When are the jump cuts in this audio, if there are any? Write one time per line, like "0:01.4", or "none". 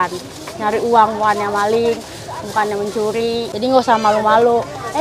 0:03.5